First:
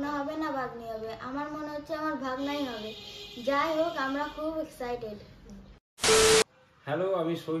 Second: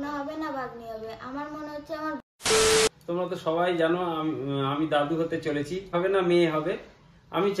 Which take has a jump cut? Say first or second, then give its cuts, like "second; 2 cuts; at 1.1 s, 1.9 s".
second; 3 cuts; at 2.2 s, 3.0 s, 5.9 s